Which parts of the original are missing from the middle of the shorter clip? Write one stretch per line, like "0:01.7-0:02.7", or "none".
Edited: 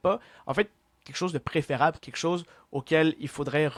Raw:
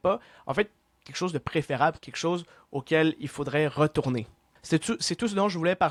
none